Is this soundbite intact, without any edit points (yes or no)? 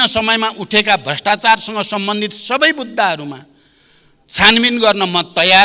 yes